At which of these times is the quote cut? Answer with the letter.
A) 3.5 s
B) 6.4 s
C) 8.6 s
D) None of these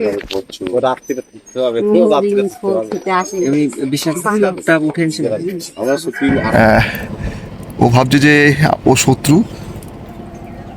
B